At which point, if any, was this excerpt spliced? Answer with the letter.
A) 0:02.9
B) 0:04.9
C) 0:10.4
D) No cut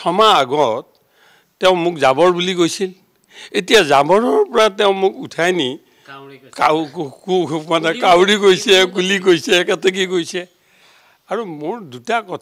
D